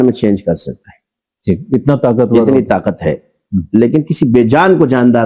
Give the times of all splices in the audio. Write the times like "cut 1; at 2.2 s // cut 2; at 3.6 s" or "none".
none